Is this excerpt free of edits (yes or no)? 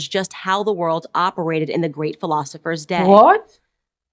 yes